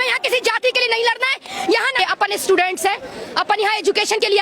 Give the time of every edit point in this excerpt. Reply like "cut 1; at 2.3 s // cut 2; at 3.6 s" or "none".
cut 1; at 2.0 s